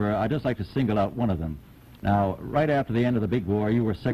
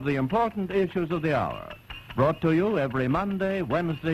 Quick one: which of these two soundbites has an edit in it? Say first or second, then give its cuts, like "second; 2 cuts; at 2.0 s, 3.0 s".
first; 1 cut; at 1.2 s